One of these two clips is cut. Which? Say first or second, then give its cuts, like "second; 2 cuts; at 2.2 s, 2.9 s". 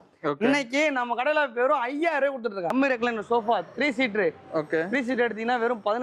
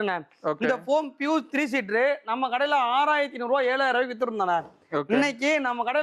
first; 1 cut; at 2.7 s